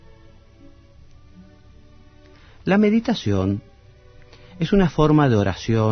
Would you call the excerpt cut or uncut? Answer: cut